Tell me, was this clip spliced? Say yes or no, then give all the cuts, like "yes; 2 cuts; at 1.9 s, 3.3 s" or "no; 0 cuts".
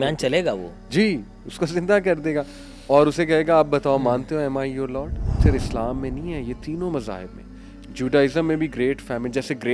yes; 1 cut; at 5.4 s